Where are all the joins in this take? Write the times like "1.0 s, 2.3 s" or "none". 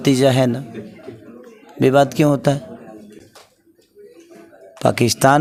none